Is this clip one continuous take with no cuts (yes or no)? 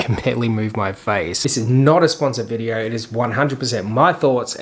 no